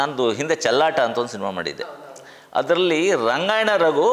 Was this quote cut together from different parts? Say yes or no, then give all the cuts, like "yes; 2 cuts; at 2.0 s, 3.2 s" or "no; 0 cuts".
no; 0 cuts